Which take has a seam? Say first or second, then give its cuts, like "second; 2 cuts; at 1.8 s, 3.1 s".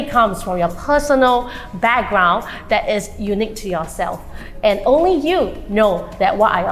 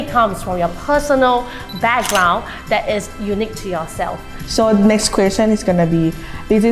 second; 1 cut; at 4.4 s